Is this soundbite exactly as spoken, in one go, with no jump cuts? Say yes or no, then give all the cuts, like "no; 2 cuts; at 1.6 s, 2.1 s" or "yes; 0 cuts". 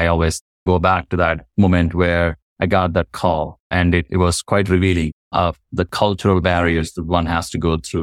no; 3 cuts; at 2.4 s, 3.6 s, 5.2 s